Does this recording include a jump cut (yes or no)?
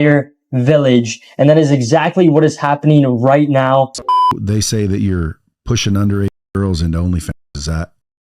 yes